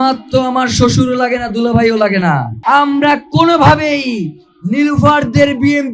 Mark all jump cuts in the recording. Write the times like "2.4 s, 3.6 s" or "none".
2.5 s